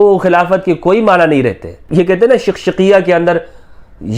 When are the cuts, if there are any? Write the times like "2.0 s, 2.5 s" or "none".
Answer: 1.8 s